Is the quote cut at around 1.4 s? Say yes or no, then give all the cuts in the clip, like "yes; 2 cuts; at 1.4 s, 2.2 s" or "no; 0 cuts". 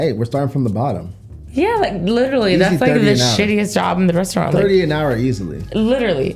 yes; 1 cut; at 1.4 s